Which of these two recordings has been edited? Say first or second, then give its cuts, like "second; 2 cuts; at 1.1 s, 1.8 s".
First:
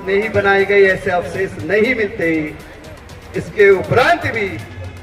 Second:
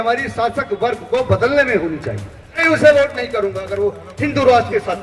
second; 1 cut; at 2.6 s